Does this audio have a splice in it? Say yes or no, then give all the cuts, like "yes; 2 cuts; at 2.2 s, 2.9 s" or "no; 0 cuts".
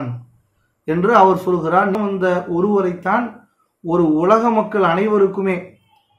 yes; 1 cut; at 2.0 s